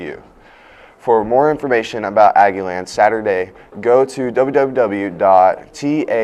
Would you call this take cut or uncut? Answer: uncut